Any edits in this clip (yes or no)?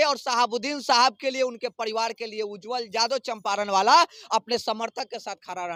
no